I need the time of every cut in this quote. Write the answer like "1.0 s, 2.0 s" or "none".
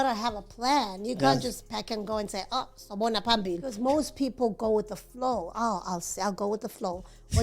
3.6 s